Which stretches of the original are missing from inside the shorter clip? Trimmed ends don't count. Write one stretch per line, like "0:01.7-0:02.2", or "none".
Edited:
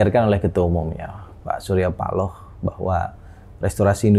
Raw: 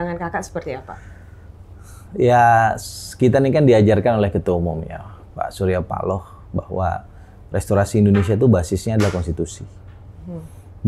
none